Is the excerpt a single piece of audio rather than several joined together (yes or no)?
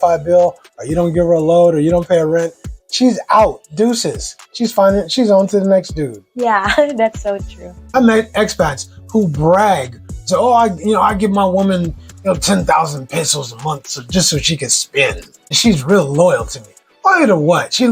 no